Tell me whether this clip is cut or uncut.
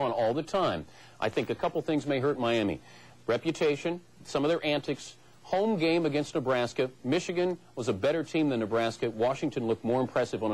uncut